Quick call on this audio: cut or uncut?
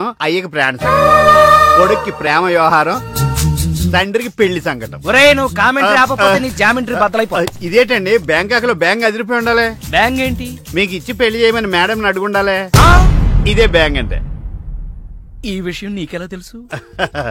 uncut